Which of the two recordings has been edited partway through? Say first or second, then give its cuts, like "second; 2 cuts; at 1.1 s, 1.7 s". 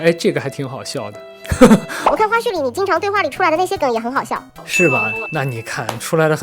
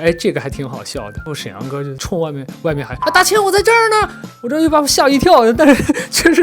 second; 2 cuts; at 1.2 s, 4.2 s